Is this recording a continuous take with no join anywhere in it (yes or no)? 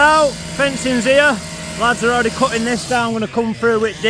yes